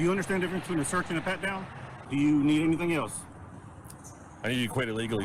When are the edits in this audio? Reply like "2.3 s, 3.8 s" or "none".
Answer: 2.0 s